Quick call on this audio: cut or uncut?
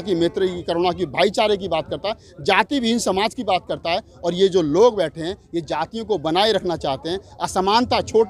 uncut